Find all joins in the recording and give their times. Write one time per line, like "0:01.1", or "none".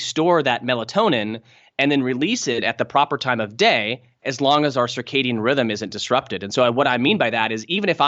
none